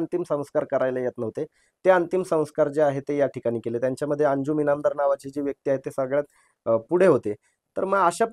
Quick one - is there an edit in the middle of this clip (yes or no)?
no